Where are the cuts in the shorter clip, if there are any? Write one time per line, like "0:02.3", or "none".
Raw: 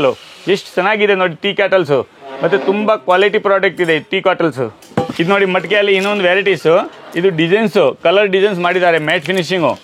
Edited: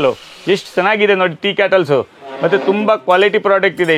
none

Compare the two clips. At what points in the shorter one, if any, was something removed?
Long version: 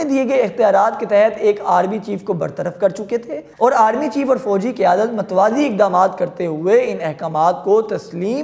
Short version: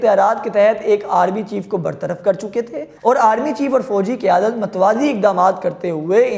none

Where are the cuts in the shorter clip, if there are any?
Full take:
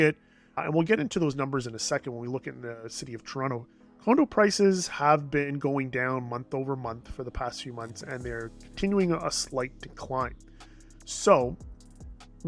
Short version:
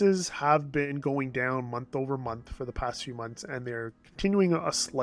none

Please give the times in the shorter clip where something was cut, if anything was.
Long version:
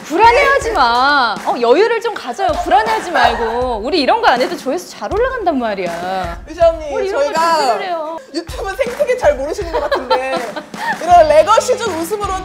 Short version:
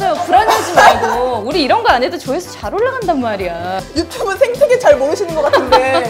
0:03.8

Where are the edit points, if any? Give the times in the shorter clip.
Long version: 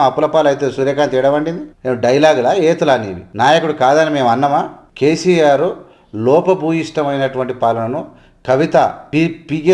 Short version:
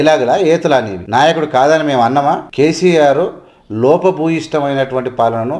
0:01.0
0:02.4

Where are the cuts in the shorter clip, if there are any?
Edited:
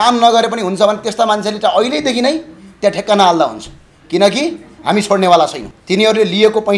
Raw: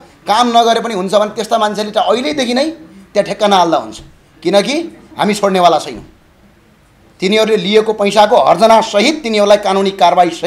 0:05.7

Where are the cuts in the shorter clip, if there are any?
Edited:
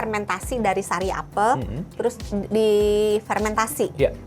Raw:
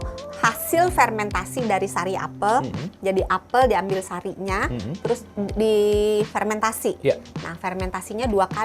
0:01.9

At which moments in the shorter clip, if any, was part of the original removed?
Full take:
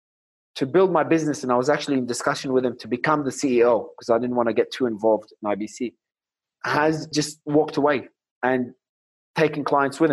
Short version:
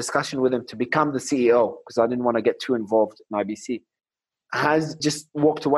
none

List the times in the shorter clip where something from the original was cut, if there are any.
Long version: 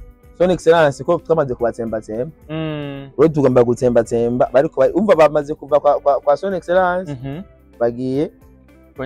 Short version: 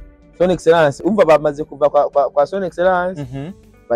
0:01.0

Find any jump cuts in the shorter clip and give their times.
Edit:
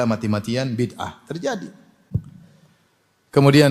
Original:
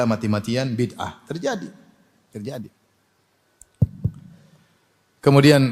0:02.0

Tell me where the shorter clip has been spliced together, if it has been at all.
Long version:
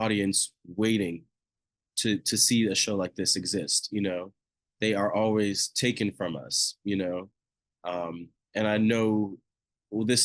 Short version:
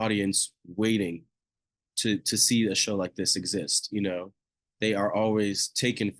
none

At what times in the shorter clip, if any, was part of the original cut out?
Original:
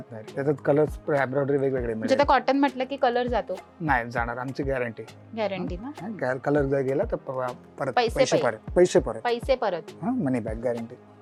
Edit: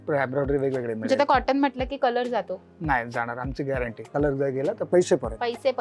0:04.1
0:04.8

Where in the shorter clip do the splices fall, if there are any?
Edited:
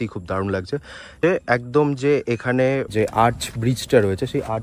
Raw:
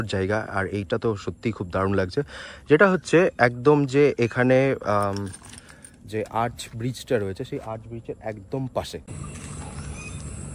0:01.1
0:02.9

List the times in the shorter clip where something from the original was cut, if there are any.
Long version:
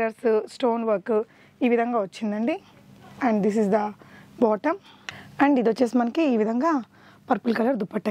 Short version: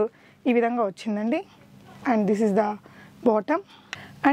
none

